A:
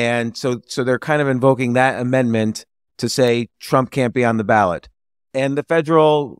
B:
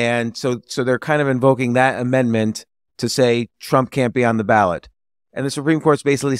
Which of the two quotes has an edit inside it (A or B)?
B